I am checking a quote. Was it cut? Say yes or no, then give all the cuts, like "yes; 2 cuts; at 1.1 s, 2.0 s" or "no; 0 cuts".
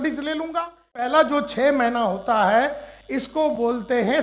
yes; 1 cut; at 1.1 s